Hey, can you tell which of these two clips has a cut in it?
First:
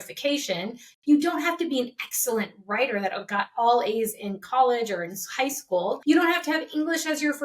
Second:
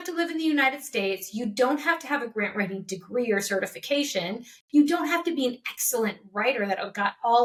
first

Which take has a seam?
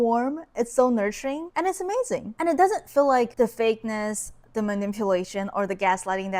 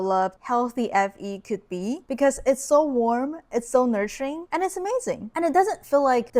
second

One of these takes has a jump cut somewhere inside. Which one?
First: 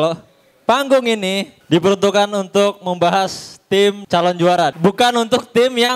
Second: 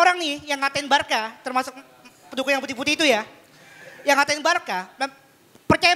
first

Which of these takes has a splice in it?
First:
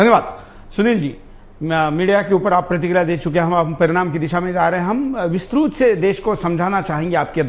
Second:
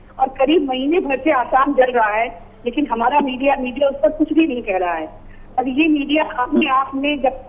second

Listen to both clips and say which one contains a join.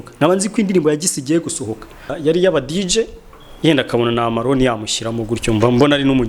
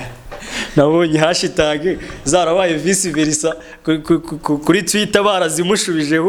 first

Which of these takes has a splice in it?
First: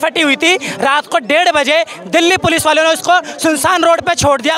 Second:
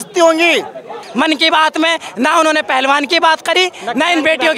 second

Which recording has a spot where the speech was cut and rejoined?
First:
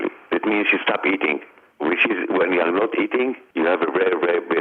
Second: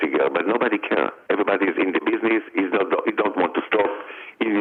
first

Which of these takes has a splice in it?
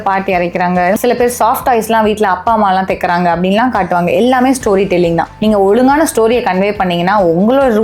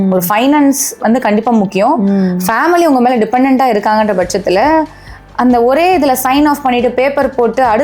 first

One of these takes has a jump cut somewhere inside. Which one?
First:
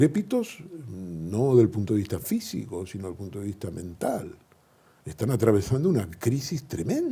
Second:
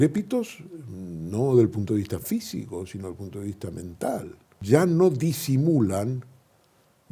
second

